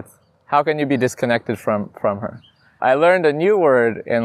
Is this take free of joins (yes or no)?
no